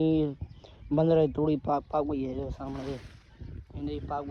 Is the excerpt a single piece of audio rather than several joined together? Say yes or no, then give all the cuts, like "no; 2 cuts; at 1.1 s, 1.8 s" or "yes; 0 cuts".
yes; 0 cuts